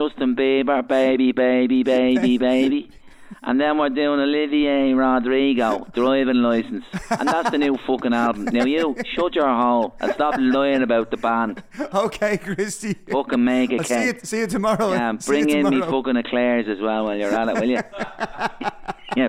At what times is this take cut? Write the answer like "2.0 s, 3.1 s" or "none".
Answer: none